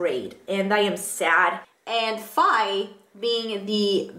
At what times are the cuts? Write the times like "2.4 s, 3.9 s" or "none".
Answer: 1.7 s

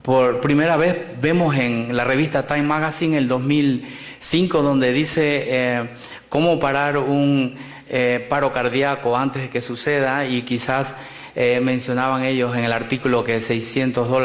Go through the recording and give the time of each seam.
6.0 s

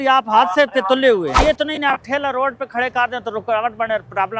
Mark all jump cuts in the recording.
1.4 s

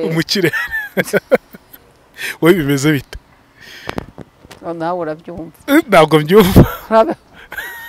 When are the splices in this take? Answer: none

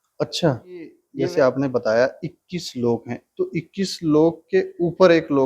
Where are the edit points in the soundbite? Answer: 1.0 s

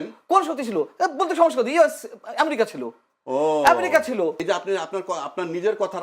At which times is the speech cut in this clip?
4.4 s

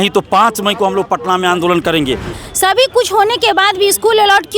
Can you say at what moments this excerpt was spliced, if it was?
2.3 s

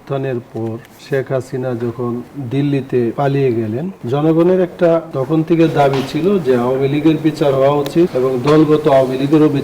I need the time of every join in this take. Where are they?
0.9 s, 2.3 s, 3.1 s, 4.0 s, 5.1 s, 8.1 s

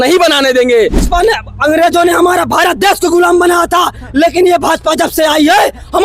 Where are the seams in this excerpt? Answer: 1.0 s

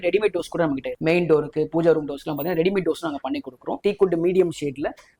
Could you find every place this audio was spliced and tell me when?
0.9 s, 3.7 s

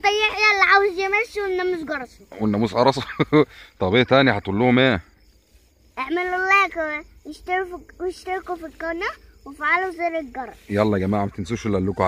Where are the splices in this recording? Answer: none

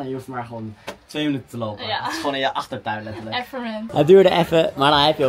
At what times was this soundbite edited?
3.9 s

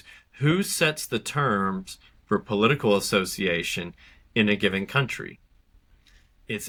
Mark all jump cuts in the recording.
none

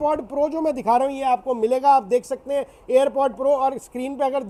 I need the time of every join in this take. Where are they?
none

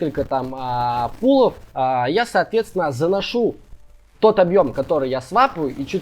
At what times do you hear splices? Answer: 1.6 s

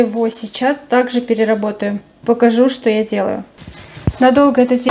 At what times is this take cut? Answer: none

